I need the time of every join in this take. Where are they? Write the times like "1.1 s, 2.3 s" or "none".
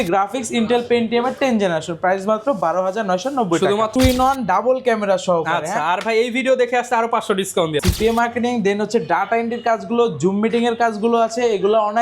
3.9 s, 7.8 s